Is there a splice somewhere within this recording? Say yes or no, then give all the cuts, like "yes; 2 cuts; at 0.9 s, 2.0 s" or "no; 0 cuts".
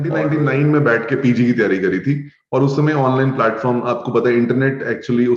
no; 0 cuts